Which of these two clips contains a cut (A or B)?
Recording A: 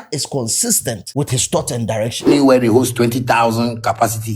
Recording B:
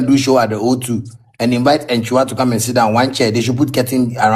A